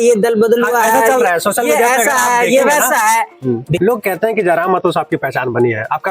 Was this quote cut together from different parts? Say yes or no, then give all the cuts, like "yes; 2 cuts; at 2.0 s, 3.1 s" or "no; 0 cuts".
yes; 1 cut; at 3.7 s